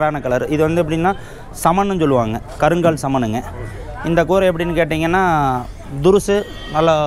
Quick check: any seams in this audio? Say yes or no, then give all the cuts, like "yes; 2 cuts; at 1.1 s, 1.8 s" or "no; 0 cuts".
no; 0 cuts